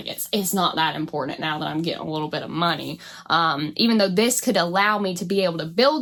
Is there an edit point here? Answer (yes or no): no